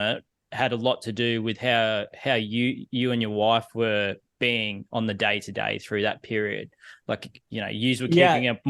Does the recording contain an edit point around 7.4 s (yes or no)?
yes